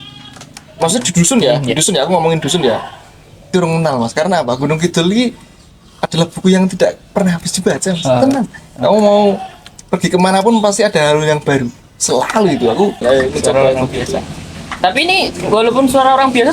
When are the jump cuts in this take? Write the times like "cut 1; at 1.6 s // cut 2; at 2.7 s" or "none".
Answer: cut 1; at 3.5 s // cut 2; at 13.0 s